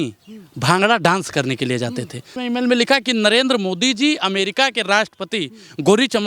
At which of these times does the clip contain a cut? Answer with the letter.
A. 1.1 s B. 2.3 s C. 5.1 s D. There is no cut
B